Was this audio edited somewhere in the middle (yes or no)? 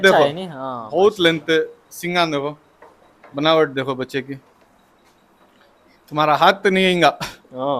no